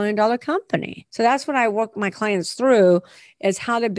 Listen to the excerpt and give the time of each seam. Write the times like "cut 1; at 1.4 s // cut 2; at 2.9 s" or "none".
cut 1; at 1.0 s // cut 2; at 2.0 s